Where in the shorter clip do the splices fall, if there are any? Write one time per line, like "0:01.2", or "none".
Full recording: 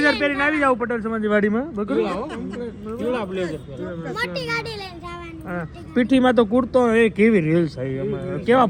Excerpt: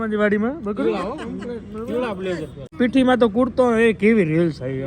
0:02.6